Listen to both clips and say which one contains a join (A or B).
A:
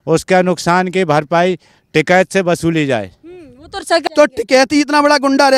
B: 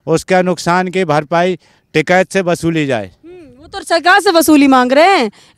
A